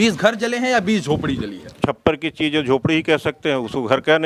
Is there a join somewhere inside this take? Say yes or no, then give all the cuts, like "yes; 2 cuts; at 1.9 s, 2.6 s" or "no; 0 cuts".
yes; 1 cut; at 1.8 s